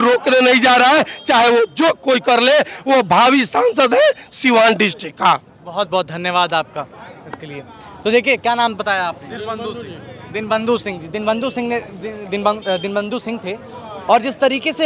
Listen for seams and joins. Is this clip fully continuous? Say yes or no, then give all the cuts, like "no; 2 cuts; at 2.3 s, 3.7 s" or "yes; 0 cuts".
yes; 0 cuts